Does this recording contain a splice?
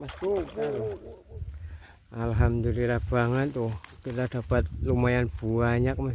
yes; 1 cut; at 1.1 s

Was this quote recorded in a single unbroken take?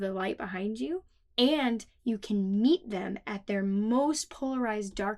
no; 1 cut; at 1.2 s

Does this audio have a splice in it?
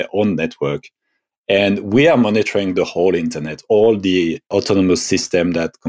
yes; 1 cut; at 4.4 s

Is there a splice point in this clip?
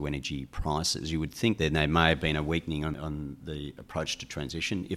yes; 2 cuts; at 1.6 s, 2.9 s

